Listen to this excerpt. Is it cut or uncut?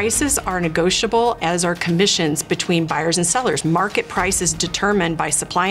uncut